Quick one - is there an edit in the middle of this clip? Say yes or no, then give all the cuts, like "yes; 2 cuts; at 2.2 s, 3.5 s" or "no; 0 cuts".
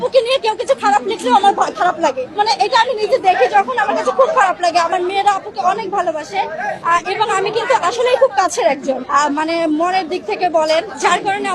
no; 0 cuts